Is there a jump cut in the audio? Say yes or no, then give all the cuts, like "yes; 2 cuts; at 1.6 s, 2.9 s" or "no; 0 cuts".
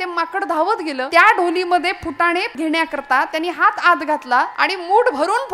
yes; 3 cuts; at 1.1 s, 2.5 s, 4.5 s